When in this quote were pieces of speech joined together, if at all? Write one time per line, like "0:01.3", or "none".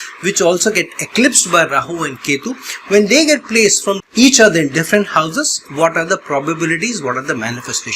0:04.0